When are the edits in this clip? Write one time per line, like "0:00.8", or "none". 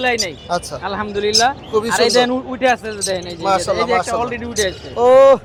none